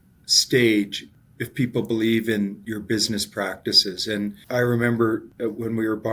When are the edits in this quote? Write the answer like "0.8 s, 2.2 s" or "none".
1.0 s, 2.6 s, 4.4 s, 5.3 s